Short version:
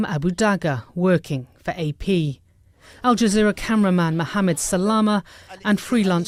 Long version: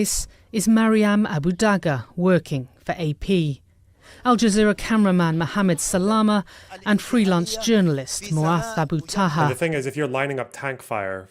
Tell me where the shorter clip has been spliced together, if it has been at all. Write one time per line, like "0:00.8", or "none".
none